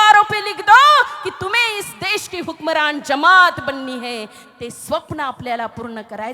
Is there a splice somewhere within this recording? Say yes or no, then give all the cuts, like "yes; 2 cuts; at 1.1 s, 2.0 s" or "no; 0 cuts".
no; 0 cuts